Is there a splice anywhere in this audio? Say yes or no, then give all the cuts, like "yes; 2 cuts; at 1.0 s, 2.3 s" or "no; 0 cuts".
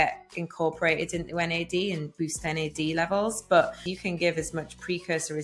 yes; 1 cut; at 3.9 s